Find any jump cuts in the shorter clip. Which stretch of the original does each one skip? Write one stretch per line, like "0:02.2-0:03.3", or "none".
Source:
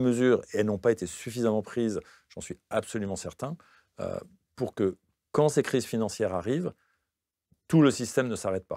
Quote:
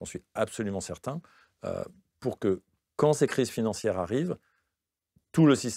none